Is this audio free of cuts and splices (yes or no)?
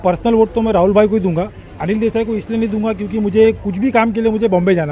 yes